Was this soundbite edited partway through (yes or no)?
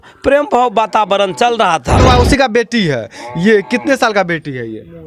yes